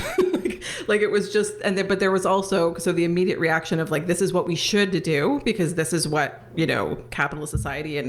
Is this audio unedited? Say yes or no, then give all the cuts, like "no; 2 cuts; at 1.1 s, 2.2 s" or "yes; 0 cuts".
yes; 0 cuts